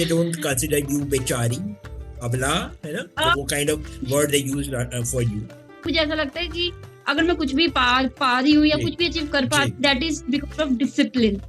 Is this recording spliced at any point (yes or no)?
yes